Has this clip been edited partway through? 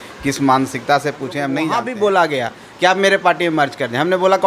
yes; 1 cut; at 1.6 s

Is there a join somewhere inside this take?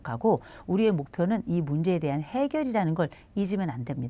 no; 0 cuts

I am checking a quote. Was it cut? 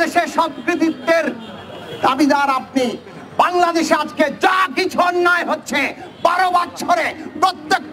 no; 0 cuts

